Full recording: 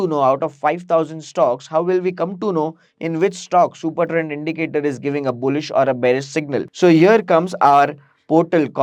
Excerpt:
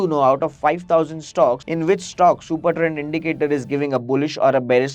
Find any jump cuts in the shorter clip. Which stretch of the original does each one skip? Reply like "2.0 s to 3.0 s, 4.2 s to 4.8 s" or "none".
1.6 s to 3.0 s